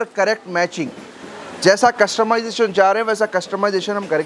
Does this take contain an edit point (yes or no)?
no